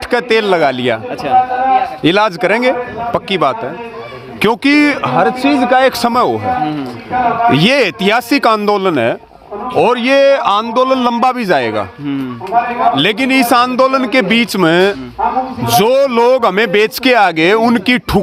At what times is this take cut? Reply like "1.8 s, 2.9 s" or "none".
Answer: none